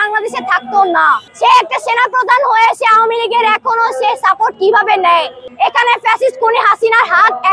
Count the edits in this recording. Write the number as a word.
two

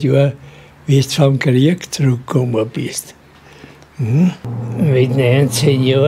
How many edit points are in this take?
one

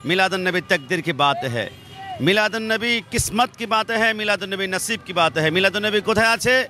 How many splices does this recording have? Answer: zero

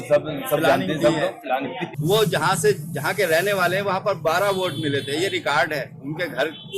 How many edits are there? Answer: one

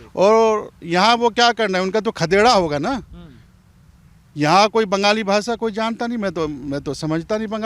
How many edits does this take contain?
zero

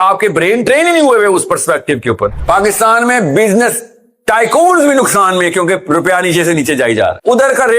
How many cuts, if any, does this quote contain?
one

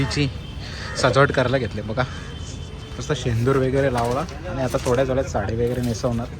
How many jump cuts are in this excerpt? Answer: zero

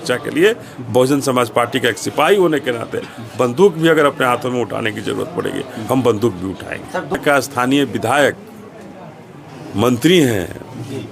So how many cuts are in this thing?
one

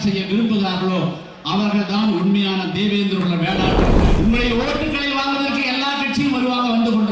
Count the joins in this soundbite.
one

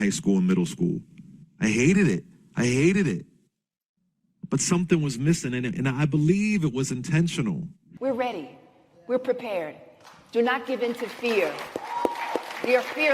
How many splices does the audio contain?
one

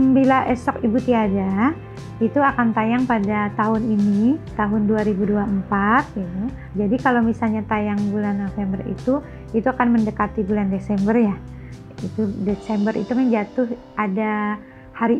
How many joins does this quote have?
two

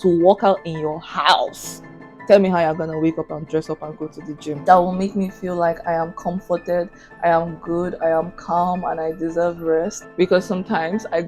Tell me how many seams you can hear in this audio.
two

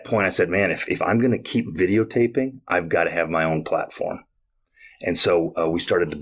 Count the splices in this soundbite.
zero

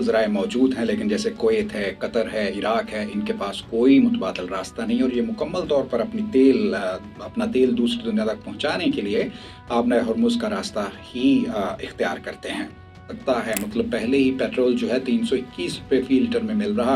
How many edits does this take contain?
one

